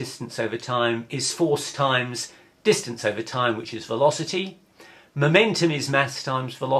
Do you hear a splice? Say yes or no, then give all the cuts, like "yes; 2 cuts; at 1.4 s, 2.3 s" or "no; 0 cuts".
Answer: yes; 1 cut; at 4.2 s